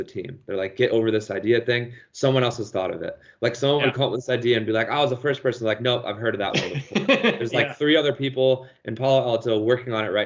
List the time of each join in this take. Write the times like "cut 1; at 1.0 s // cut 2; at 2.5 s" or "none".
none